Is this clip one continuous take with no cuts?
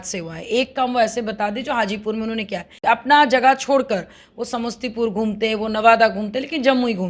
no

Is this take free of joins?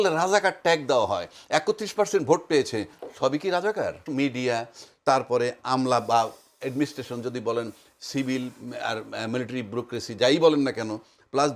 no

